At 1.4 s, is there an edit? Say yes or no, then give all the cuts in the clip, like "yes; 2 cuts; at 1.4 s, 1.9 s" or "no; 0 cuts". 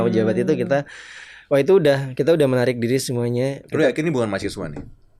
no; 1 cut; at 3.6 s